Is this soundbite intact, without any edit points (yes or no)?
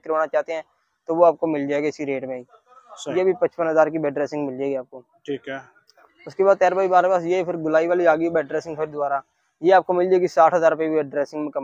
yes